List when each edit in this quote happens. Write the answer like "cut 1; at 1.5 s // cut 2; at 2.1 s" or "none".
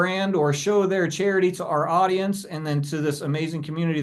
none